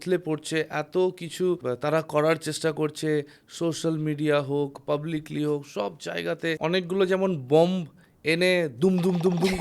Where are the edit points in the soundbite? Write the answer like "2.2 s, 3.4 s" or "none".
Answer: 1.6 s, 6.5 s